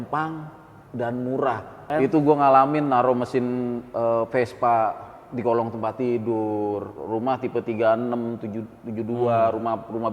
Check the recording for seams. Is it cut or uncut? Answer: cut